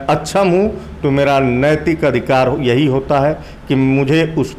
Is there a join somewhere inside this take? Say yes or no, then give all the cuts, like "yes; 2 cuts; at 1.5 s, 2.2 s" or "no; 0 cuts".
no; 0 cuts